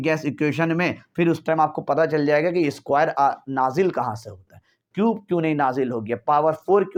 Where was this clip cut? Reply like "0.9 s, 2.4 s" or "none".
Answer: none